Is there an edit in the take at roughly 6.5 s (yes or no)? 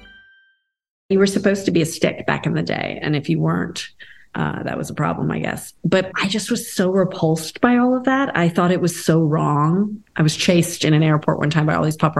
no